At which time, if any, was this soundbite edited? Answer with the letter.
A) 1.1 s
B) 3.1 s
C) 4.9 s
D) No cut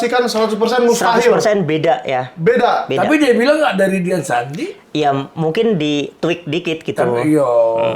D